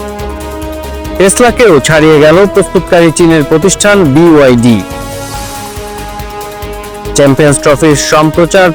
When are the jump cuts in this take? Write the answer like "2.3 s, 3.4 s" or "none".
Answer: 1.2 s